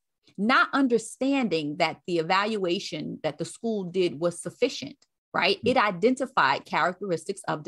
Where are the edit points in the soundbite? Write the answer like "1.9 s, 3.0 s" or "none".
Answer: none